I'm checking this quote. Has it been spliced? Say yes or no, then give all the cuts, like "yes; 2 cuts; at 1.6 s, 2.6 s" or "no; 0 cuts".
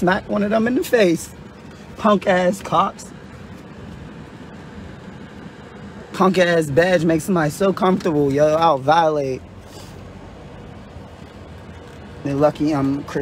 yes; 1 cut; at 3.3 s